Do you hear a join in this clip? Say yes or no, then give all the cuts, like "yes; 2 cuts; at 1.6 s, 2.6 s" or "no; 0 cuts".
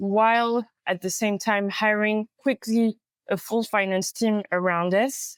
no; 0 cuts